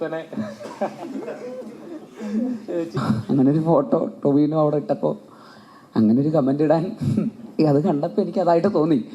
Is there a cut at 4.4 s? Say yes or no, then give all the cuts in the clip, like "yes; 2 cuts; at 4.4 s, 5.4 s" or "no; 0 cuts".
no; 1 cut; at 3.0 s